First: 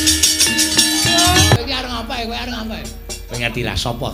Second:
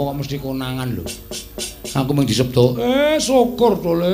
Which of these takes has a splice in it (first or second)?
first